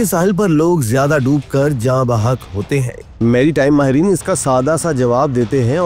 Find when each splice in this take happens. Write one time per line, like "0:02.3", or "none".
none